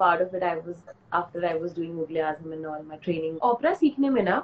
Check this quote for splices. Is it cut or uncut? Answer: cut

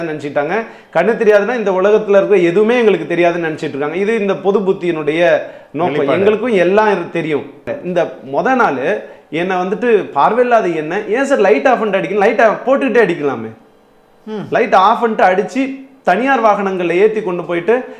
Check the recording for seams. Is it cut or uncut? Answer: cut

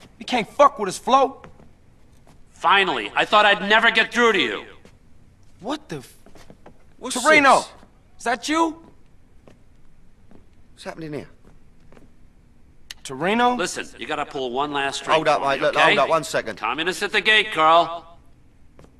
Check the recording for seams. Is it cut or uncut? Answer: cut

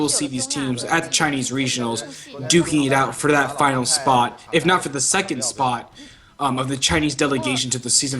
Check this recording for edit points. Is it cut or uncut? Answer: cut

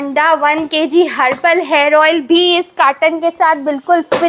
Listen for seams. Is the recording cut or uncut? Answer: uncut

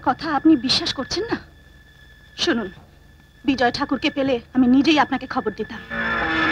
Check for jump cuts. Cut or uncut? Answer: uncut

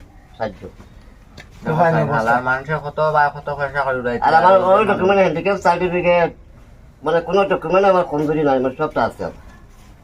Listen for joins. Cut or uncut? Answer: uncut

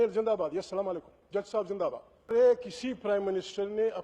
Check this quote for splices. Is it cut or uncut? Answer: cut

